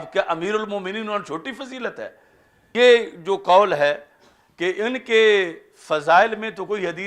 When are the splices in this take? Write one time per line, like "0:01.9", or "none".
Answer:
0:02.7